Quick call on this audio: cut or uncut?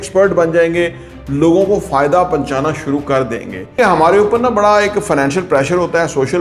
cut